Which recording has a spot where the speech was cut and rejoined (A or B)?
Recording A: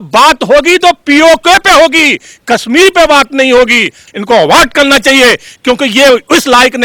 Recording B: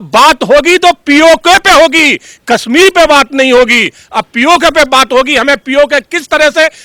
A